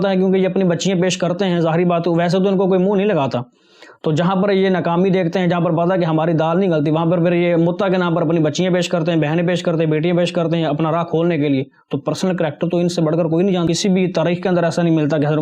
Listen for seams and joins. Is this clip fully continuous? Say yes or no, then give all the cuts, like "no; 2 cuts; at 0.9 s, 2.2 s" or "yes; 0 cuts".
no; 1 cut; at 13.7 s